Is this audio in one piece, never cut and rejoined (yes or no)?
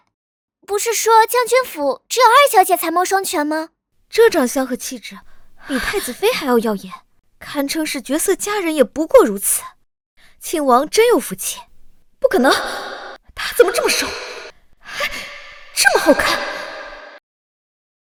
yes